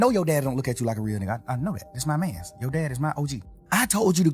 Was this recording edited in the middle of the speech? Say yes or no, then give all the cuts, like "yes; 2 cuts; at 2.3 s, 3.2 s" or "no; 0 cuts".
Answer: yes; 1 cut; at 3.4 s